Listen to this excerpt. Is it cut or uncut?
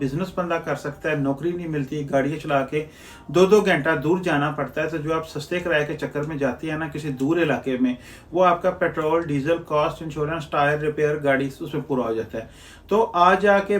uncut